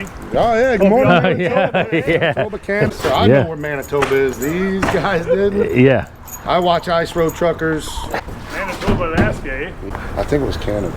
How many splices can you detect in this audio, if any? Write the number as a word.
three